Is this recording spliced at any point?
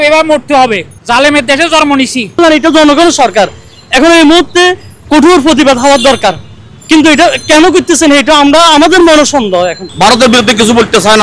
yes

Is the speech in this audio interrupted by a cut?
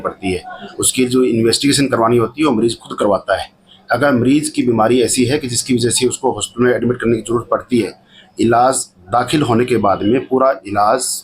no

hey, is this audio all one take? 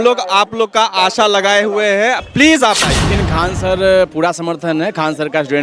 no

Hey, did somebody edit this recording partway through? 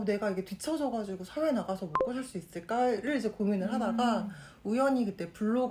no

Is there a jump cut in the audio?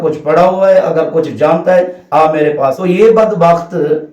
yes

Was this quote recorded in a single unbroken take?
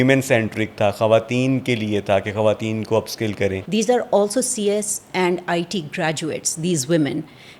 no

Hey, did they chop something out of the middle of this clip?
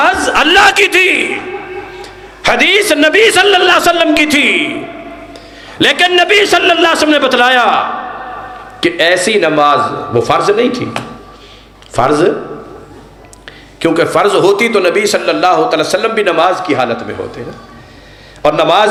no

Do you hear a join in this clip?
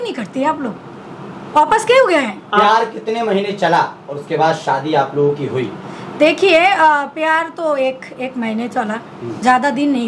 no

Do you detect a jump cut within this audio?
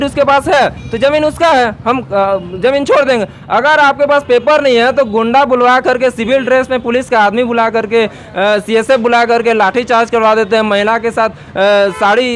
no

